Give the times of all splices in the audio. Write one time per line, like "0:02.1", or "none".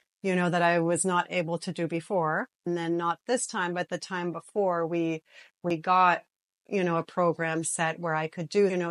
0:02.6

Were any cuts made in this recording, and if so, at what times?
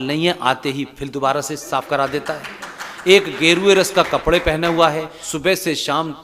0:05.2

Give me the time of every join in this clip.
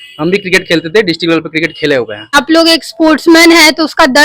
0:02.4

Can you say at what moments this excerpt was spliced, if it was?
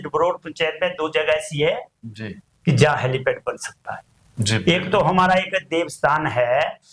none

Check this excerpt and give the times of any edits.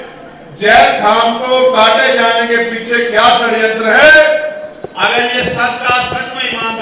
none

